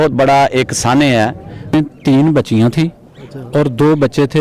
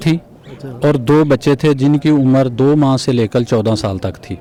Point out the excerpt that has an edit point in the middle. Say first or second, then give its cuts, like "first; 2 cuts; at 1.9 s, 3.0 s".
first; 1 cut; at 1.7 s